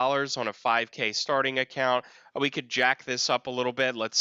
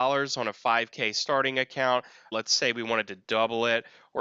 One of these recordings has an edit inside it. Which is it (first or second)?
second